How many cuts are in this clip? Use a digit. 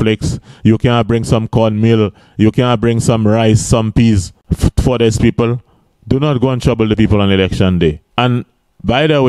2